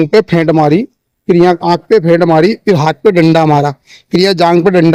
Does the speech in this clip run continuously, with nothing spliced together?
yes; 0 cuts

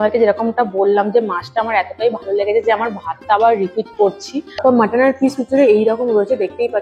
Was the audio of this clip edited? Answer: yes; 1 cut; at 4.5 s

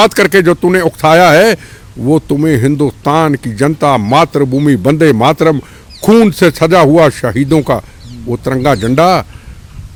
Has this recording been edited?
no; 0 cuts

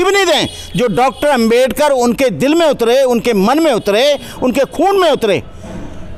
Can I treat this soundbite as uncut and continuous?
yes; 0 cuts

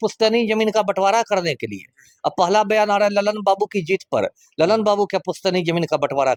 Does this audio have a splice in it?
no; 0 cuts

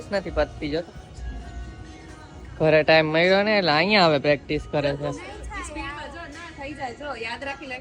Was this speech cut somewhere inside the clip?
no; 0 cuts

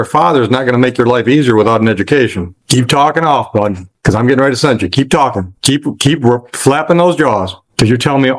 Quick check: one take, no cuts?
yes; 0 cuts

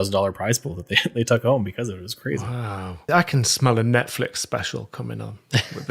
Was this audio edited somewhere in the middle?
yes; 1 cut; at 3.0 s

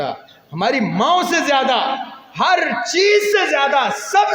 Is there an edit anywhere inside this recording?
no; 0 cuts

